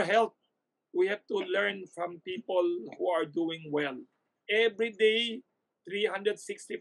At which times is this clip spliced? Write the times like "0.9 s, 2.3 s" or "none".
4.4 s